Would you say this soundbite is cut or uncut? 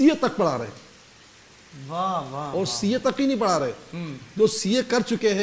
uncut